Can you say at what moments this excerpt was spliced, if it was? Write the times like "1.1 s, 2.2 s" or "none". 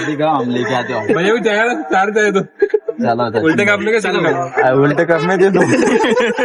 none